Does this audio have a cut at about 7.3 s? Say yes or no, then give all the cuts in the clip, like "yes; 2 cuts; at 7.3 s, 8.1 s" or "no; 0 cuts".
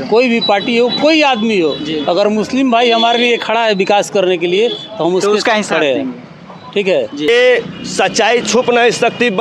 yes; 1 cut; at 7.3 s